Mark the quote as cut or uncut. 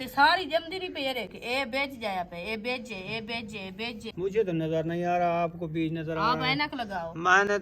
cut